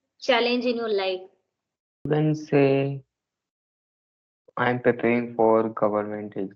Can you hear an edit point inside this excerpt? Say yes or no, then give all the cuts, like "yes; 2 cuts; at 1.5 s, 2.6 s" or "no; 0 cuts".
yes; 1 cut; at 2.1 s